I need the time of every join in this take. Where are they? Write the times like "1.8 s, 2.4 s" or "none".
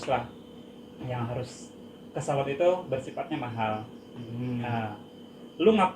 none